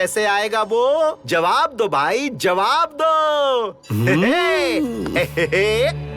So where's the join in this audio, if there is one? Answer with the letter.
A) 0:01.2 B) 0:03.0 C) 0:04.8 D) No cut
A